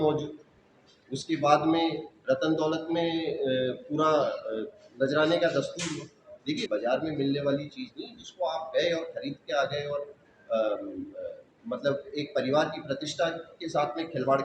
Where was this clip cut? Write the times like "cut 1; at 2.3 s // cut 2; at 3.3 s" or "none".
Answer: cut 1; at 6.7 s